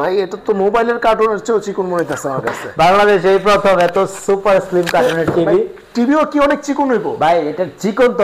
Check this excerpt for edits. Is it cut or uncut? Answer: uncut